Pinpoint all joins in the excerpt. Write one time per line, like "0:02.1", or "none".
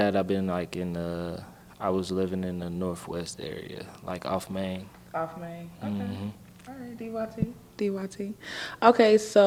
none